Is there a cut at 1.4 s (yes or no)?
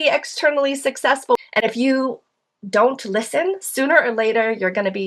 yes